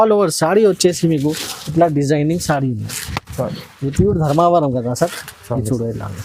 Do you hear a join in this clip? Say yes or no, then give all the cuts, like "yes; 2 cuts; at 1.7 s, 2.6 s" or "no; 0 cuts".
no; 0 cuts